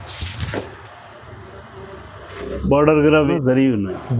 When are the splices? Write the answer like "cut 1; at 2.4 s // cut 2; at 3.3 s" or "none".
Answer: cut 1; at 3.3 s

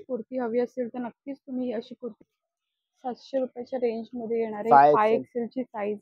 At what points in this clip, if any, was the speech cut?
cut 1; at 2.2 s

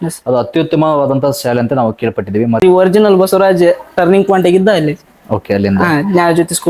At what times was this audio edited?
cut 1; at 2.6 s

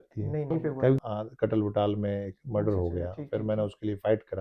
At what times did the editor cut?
cut 1; at 1.0 s

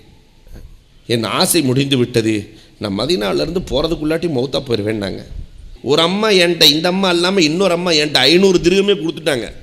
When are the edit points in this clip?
cut 1; at 5.7 s

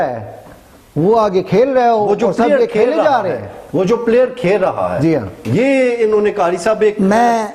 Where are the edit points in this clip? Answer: none

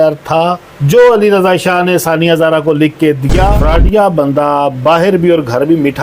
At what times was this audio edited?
cut 1; at 3.6 s

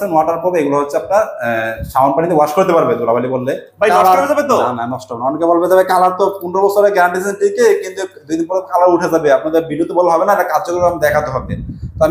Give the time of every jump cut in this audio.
cut 1; at 3.7 s

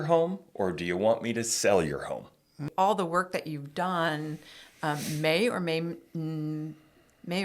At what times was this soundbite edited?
cut 1; at 2.7 s

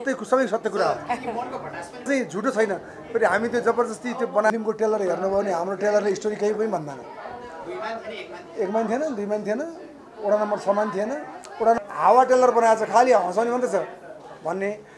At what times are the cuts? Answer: cut 1; at 2.1 s // cut 2; at 4.5 s // cut 3; at 11.8 s

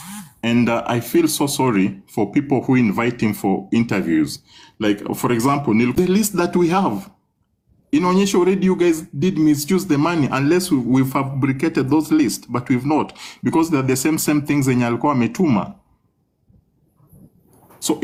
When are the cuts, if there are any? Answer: none

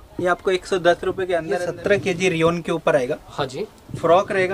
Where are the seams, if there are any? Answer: cut 1; at 1.5 s

